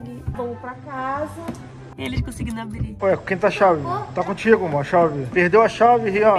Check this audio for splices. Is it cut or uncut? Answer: cut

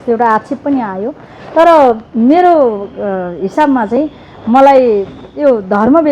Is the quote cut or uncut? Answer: uncut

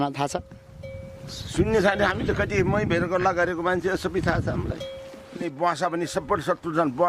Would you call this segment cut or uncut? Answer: cut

